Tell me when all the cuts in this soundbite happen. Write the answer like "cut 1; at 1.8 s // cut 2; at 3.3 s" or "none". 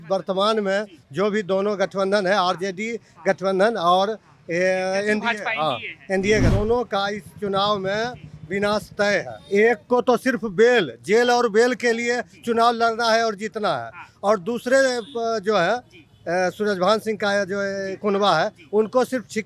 cut 1; at 6.5 s // cut 2; at 9.4 s